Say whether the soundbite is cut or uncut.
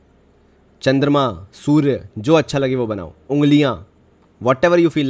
uncut